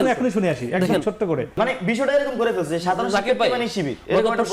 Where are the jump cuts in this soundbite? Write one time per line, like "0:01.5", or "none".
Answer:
0:01.5